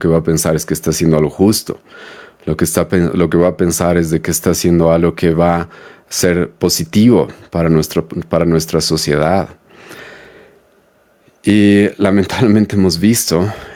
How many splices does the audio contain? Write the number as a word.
zero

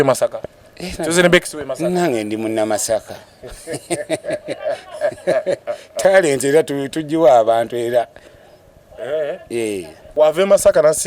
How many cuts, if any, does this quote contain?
one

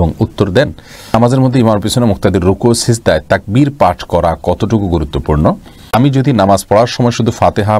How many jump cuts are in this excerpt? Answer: two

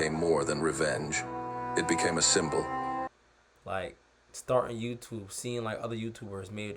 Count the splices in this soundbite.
one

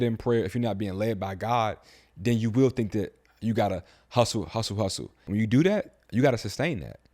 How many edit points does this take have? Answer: one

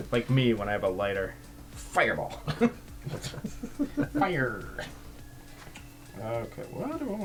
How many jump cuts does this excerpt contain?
zero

